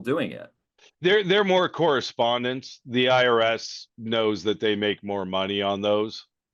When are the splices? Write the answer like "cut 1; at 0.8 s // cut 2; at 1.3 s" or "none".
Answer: none